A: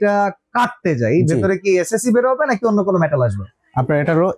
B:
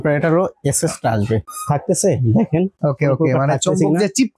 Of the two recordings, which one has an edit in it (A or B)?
B